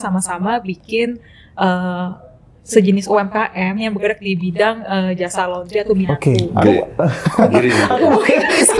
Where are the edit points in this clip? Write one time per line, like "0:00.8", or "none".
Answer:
0:06.1